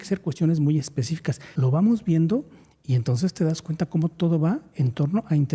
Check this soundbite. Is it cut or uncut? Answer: cut